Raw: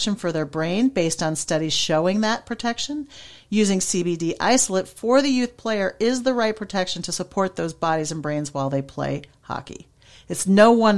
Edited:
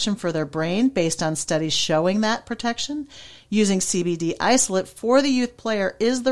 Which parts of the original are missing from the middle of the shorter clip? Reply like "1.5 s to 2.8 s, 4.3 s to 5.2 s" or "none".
none